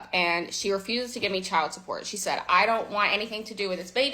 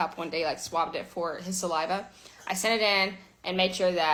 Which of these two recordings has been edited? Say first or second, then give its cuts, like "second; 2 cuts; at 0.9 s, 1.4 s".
first; 1 cut; at 2.7 s